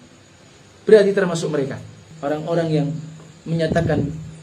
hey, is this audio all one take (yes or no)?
no